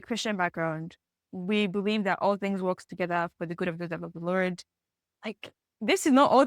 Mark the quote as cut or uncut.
cut